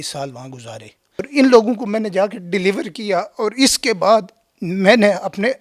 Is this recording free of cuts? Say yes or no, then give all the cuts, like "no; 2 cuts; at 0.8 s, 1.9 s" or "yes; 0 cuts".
no; 1 cut; at 1.2 s